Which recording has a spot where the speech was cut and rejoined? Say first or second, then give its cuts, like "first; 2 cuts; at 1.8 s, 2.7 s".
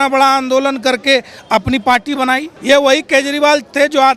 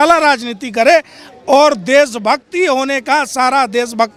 first; 1 cut; at 2.5 s